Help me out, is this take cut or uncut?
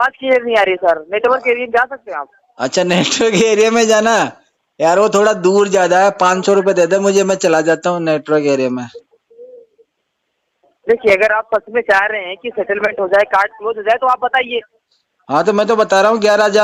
uncut